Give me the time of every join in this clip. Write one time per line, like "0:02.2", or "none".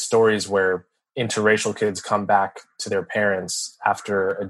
0:01.1